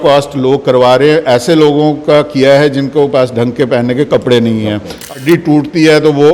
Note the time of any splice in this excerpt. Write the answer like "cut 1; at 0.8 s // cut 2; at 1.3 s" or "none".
cut 1; at 5.0 s